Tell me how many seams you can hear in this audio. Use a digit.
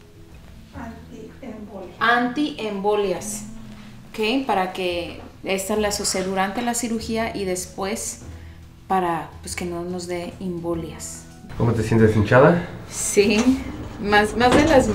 1